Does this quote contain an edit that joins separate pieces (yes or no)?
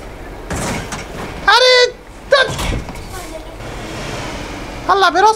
yes